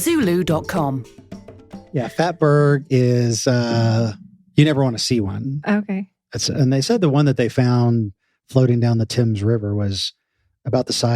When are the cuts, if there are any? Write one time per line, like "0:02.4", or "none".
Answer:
0:01.9